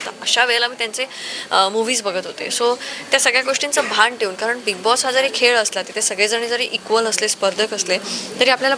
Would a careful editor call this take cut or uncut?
uncut